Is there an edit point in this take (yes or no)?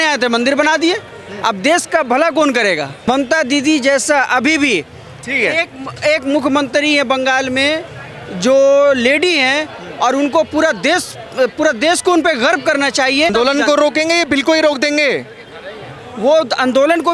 yes